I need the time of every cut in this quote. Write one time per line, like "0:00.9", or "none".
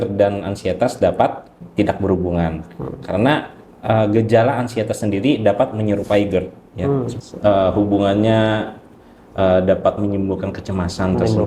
0:01.6
0:07.1